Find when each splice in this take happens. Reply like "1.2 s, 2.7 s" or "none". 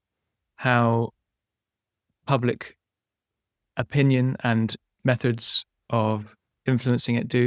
none